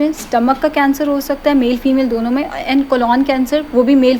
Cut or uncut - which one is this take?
uncut